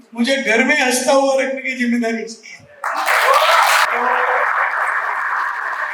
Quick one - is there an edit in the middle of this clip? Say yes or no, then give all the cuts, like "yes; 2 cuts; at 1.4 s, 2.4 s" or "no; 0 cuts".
no; 0 cuts